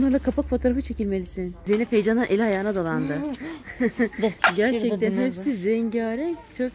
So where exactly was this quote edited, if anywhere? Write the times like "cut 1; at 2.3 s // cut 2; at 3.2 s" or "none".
none